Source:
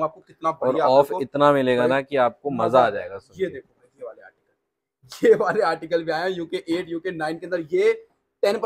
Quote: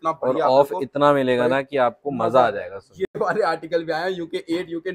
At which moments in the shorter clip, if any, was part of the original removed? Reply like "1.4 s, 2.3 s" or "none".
3.2 s